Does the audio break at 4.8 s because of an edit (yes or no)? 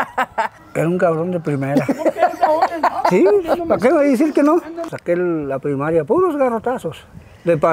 yes